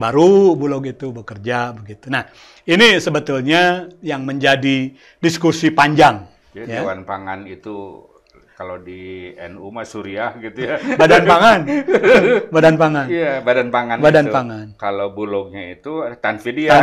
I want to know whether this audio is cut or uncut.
uncut